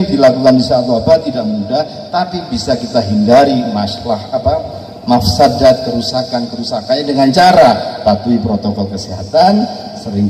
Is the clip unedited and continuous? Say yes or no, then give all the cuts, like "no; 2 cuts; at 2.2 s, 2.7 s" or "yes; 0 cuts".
yes; 0 cuts